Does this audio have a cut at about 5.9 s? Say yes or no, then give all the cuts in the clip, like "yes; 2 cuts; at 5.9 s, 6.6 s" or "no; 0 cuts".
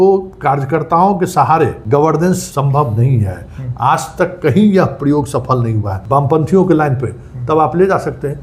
yes; 3 cuts; at 1.8 s, 2.5 s, 5.9 s